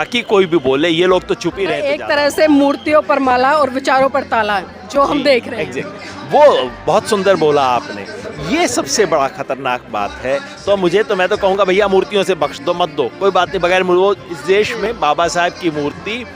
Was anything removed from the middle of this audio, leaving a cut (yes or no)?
yes